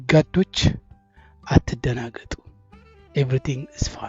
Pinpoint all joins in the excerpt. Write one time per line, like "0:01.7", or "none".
none